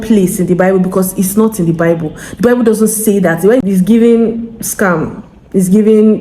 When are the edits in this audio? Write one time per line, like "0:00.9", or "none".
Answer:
0:03.6